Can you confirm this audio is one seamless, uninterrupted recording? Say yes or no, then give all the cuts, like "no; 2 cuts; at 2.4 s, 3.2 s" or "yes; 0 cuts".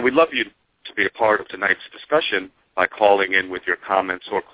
yes; 0 cuts